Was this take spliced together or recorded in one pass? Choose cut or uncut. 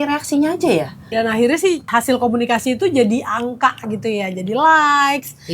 cut